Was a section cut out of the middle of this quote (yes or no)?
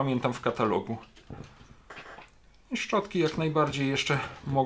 no